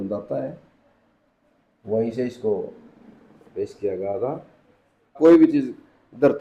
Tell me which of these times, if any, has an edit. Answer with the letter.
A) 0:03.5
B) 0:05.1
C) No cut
B